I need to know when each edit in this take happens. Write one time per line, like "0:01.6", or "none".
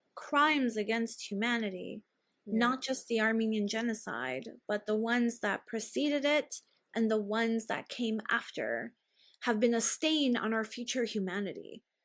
none

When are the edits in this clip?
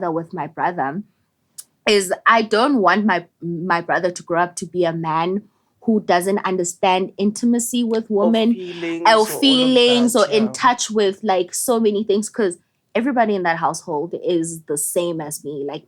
none

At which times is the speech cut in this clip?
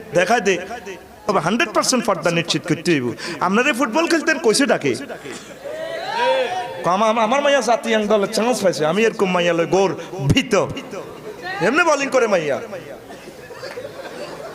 0:01.3

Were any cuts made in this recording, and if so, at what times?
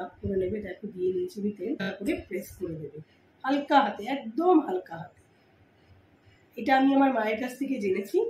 0:01.9

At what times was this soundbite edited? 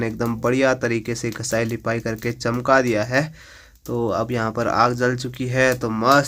none

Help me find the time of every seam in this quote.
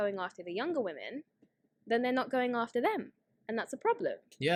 none

